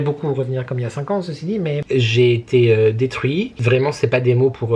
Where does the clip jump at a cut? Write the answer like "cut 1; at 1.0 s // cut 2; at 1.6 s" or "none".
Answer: cut 1; at 1.8 s // cut 2; at 3.5 s